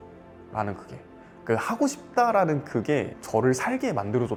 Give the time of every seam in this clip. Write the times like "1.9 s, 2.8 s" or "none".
none